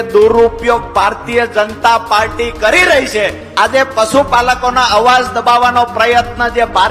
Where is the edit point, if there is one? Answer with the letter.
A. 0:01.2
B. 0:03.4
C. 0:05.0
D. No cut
B